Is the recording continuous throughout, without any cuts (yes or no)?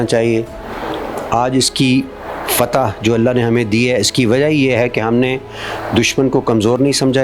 yes